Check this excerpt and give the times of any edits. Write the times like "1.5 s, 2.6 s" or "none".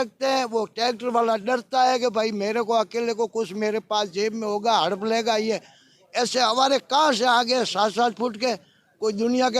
none